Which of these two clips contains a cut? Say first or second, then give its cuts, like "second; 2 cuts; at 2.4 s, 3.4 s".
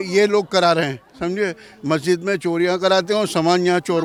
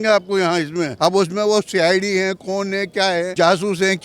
second; 2 cuts; at 0.9 s, 3.3 s